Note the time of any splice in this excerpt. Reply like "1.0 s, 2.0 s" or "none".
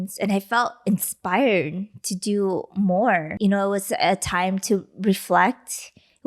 3.3 s